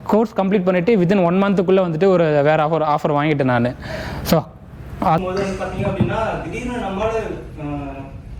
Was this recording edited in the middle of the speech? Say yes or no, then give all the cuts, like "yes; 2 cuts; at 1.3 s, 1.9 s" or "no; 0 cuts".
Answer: yes; 1 cut; at 5.2 s